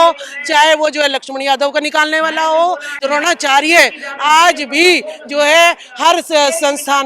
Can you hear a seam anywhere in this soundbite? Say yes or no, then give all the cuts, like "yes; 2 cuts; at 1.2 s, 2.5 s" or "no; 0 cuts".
yes; 1 cut; at 2.9 s